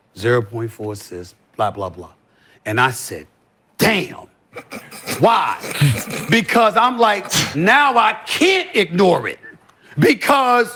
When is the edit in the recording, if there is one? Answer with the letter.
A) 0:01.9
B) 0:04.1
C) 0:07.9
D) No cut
D